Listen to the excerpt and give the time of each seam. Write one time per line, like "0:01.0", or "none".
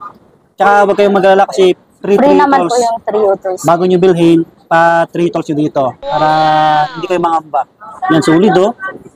none